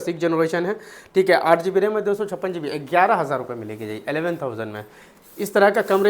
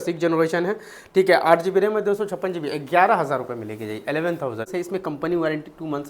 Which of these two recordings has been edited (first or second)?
second